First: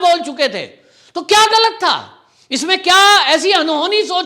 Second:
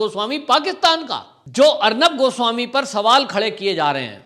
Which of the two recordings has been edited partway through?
second; 1 cut; at 1.4 s

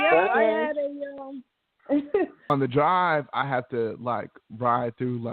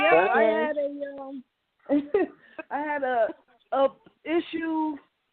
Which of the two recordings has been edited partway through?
first; 1 cut; at 2.5 s

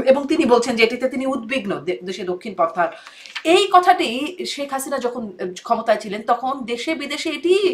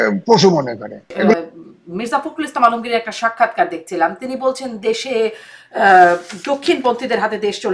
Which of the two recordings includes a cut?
second; 1 cut; at 1.3 s

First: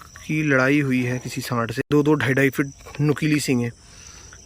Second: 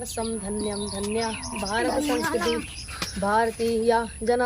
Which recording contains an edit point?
first; 1 cut; at 1.7 s

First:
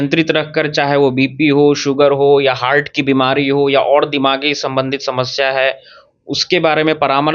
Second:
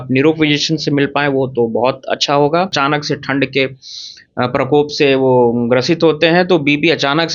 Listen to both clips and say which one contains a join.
second; 1 cut; at 2.7 s

